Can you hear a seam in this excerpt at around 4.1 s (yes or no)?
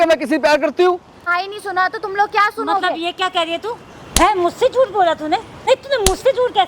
no